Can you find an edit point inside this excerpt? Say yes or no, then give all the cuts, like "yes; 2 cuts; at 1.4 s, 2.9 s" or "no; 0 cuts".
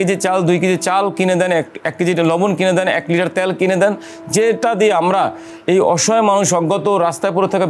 no; 0 cuts